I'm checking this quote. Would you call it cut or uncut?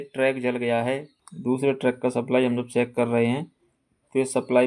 cut